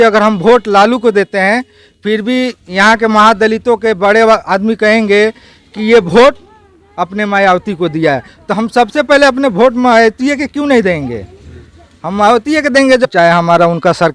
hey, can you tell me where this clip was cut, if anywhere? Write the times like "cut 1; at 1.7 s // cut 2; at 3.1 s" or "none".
cut 1; at 13.1 s